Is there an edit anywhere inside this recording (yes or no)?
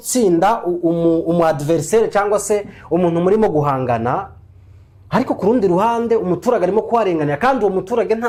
no